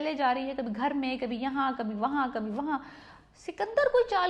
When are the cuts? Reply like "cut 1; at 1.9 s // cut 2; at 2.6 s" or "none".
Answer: none